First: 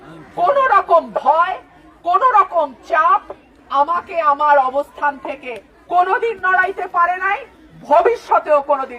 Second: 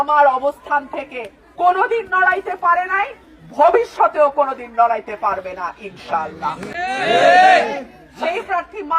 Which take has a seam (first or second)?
second